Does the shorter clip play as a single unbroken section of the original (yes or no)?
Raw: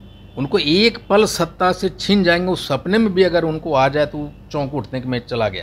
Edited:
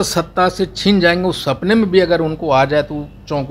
yes